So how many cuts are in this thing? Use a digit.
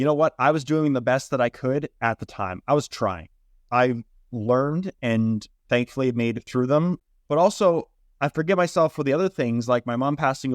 2